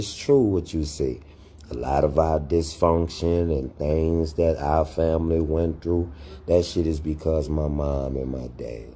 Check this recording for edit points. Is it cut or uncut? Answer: uncut